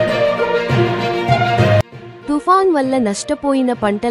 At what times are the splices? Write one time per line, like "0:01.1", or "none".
0:01.5